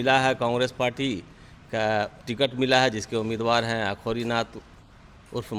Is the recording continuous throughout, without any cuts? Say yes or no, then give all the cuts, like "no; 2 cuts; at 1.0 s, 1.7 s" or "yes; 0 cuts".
yes; 0 cuts